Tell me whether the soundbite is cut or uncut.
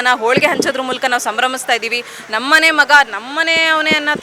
uncut